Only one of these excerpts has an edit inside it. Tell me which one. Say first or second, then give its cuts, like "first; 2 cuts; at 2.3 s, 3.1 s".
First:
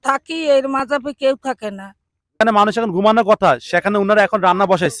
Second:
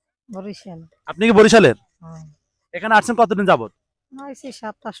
first; 1 cut; at 2.4 s